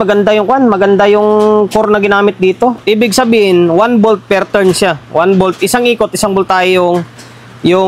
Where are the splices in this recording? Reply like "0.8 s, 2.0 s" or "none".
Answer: 2.8 s